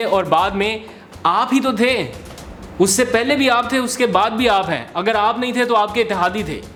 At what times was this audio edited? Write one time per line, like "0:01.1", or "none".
none